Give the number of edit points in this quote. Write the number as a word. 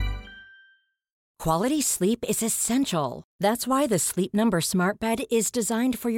one